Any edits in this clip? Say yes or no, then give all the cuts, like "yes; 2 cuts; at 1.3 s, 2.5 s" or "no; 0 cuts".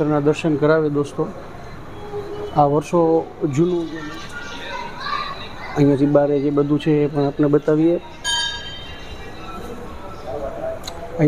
yes; 1 cut; at 3.9 s